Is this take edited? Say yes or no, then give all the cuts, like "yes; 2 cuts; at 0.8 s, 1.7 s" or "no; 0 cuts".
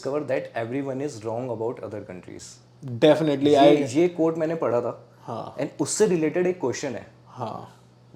no; 0 cuts